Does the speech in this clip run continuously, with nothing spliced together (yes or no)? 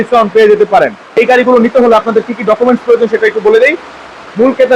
no